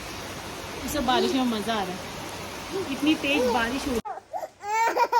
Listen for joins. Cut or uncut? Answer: cut